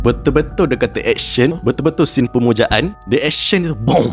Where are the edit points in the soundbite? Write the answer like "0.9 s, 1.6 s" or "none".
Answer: 1.6 s, 3.0 s